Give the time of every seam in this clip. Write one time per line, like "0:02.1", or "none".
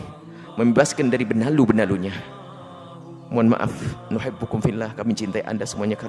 none